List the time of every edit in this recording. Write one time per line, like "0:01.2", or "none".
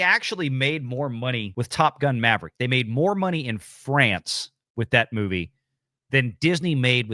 0:01.5